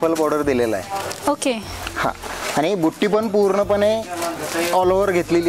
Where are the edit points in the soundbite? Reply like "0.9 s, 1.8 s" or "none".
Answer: none